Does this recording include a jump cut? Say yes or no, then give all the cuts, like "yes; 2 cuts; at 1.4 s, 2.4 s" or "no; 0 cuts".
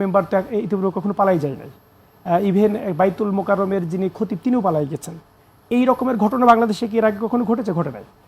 no; 0 cuts